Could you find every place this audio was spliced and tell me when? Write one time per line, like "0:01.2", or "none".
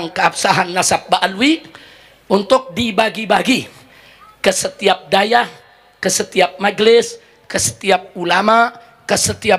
none